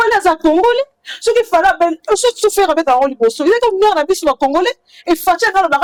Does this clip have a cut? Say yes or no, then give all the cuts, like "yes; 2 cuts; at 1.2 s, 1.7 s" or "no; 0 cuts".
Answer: no; 0 cuts